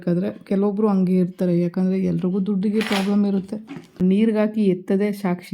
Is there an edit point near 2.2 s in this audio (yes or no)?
no